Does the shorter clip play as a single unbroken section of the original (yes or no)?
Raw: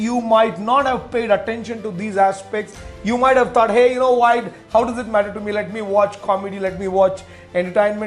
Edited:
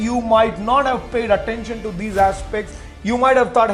yes